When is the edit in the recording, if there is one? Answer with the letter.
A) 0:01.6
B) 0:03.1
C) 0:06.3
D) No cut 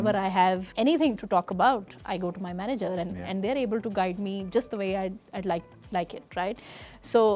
D